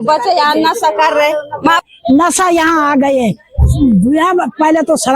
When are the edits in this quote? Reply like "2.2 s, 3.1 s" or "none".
1.8 s